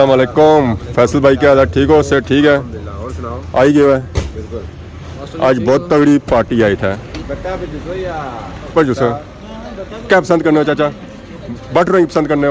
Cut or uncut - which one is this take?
cut